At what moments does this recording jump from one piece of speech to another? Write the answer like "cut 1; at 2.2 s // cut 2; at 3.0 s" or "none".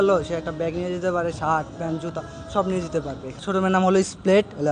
cut 1; at 3.4 s